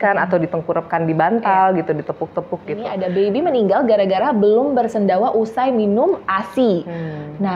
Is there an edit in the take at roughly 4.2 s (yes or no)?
no